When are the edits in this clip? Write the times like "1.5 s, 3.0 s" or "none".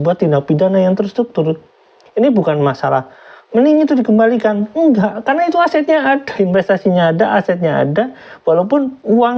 none